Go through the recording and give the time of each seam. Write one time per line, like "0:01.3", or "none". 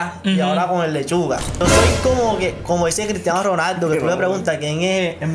0:01.6